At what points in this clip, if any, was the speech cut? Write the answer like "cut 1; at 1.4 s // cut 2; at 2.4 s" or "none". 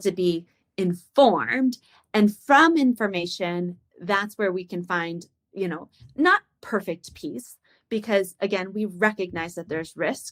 none